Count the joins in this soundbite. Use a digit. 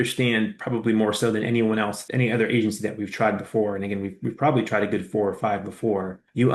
1